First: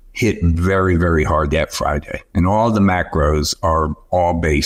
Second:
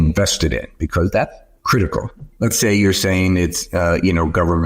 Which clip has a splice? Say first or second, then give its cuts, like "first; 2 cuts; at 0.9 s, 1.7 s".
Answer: second; 1 cut; at 2.3 s